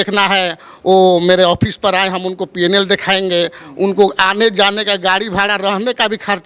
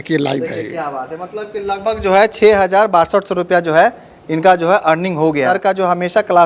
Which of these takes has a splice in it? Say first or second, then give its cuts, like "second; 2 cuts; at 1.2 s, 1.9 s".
second; 1 cut; at 5.6 s